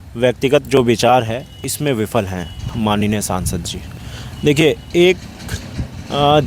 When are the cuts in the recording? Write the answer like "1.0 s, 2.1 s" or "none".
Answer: none